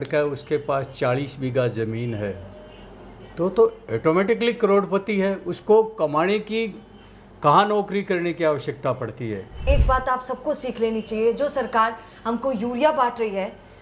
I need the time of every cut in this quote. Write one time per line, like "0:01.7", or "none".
0:09.7